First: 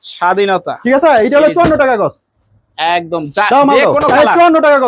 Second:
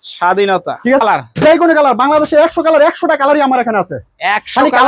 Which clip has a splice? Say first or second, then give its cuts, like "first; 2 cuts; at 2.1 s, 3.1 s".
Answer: second; 1 cut; at 1.0 s